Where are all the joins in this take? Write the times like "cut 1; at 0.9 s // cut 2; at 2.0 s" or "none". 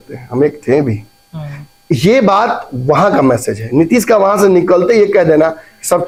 none